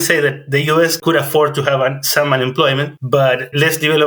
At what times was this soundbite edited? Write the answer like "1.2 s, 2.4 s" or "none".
1.0 s, 2.9 s